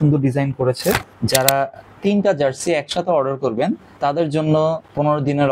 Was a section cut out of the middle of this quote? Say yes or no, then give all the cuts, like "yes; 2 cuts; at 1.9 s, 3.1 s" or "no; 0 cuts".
yes; 1 cut; at 1.1 s